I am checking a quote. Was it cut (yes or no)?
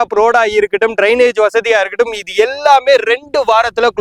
no